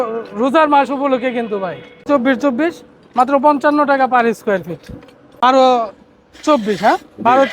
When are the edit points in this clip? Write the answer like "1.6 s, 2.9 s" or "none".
2.1 s, 5.4 s

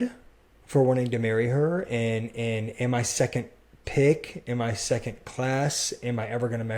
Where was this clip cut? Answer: none

